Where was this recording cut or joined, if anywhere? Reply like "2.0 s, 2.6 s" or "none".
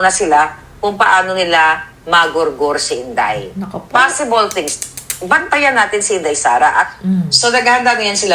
5.2 s, 7.4 s